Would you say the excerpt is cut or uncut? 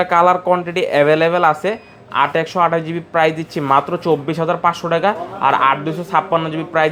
uncut